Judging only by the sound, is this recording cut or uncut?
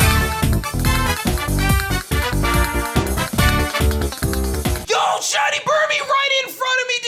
uncut